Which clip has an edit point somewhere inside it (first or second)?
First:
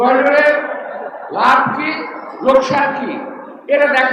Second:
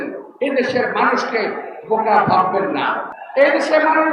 second